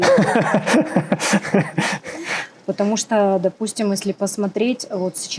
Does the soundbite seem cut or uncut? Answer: uncut